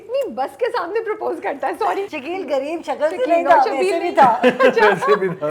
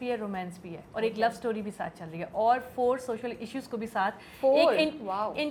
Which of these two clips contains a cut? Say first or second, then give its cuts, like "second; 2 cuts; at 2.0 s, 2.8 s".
first; 1 cut; at 2.2 s